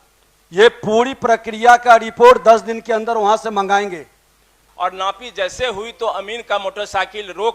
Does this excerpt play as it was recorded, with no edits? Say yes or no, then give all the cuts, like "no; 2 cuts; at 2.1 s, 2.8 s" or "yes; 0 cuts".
no; 1 cut; at 4.6 s